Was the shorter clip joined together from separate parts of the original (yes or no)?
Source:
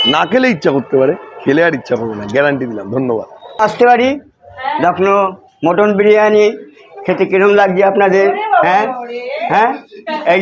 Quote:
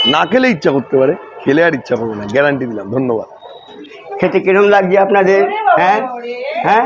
yes